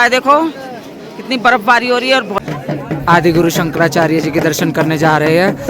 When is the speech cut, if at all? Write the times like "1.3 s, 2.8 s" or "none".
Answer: 2.4 s